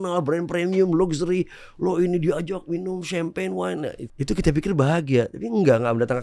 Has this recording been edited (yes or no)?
yes